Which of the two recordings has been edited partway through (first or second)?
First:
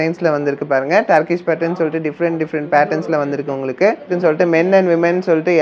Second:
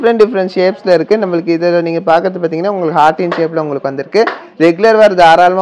first